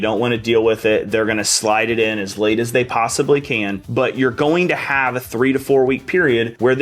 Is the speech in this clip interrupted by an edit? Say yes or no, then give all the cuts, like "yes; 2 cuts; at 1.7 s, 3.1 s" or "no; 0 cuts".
no; 0 cuts